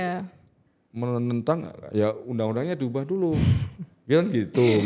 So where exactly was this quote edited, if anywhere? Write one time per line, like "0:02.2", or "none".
none